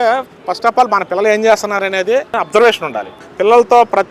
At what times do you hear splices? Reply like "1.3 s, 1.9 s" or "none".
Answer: 2.3 s, 3.2 s

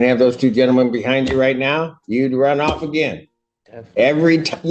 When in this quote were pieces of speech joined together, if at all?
none

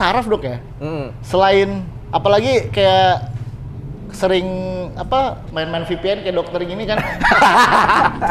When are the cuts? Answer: none

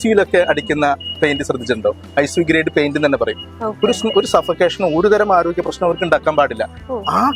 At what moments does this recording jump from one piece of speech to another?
none

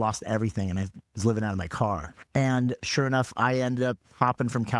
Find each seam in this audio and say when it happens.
2.1 s

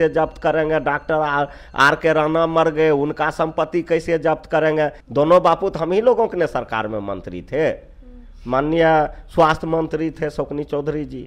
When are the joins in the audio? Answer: 5.0 s

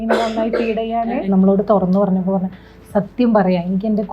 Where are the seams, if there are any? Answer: 1.2 s

